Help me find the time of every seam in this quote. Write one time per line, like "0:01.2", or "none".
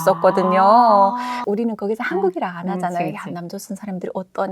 0:01.3